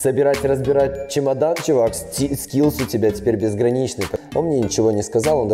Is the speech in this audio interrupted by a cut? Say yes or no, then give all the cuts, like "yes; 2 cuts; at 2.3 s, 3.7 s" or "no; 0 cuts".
yes; 1 cut; at 4.1 s